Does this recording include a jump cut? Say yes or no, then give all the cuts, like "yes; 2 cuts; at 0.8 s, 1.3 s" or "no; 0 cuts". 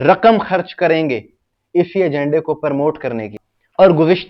yes; 1 cut; at 3.3 s